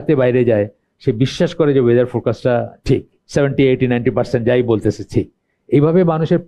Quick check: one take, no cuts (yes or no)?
no